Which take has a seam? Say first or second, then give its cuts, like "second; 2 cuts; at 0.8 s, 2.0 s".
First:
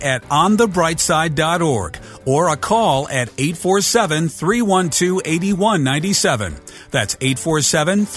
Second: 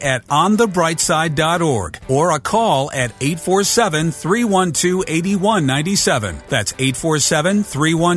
second; 2 cuts; at 1.9 s, 6.4 s